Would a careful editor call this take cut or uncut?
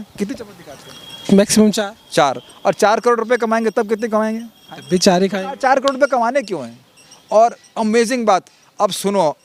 uncut